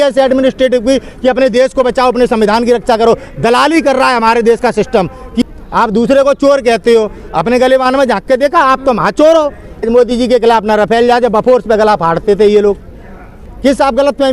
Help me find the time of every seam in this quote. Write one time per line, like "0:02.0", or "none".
0:05.4
0:09.9
0:13.3